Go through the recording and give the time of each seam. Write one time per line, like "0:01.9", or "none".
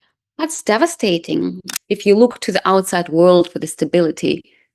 0:01.7